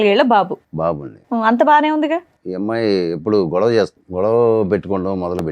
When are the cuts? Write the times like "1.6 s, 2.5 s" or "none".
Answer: 2.4 s, 4.0 s